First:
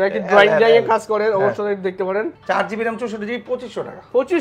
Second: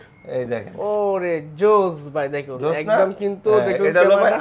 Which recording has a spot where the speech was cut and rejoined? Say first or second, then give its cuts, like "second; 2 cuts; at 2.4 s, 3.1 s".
first; 1 cut; at 2.3 s